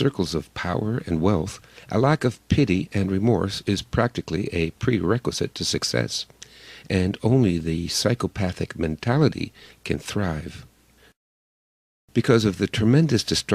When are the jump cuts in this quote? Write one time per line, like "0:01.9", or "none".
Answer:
0:03.9